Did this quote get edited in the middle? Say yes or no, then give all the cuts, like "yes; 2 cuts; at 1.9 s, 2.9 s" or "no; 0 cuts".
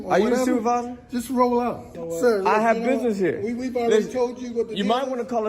yes; 1 cut; at 2.0 s